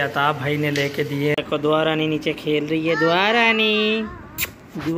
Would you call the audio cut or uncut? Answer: cut